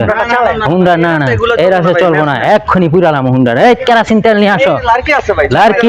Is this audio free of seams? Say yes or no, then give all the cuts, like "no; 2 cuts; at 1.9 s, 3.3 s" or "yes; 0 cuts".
yes; 0 cuts